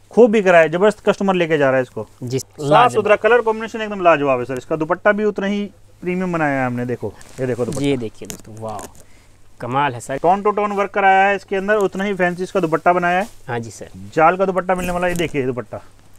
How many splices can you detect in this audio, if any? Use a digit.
3